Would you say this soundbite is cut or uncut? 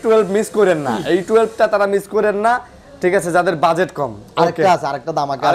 uncut